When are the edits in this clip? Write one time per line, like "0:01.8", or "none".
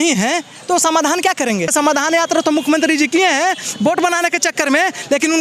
0:01.7